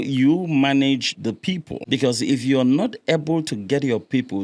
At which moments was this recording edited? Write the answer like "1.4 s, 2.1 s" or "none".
1.7 s